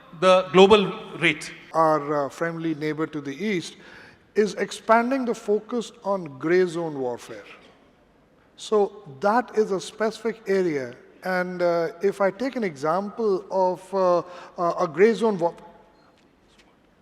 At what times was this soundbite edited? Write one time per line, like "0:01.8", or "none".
0:01.6